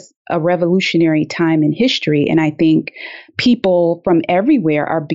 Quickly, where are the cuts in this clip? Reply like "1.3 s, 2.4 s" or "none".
none